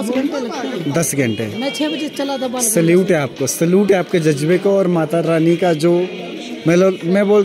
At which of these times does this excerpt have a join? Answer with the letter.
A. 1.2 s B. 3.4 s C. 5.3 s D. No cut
D